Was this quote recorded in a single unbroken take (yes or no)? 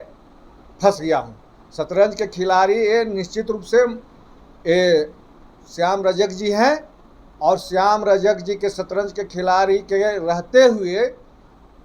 yes